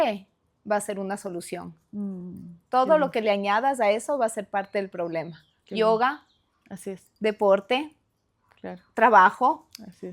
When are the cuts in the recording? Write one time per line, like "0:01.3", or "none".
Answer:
none